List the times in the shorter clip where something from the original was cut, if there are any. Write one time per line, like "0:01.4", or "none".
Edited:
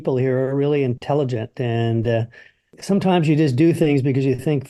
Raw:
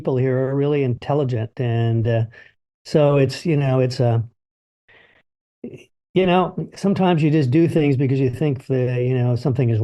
0:02.7